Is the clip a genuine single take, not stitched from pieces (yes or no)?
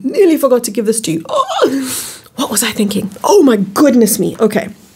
yes